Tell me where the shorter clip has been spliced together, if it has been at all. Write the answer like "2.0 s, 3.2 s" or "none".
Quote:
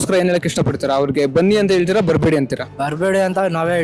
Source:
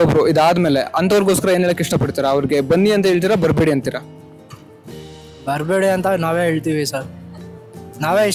2.6 s